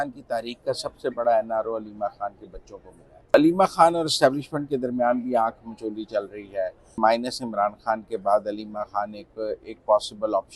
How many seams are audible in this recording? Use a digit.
2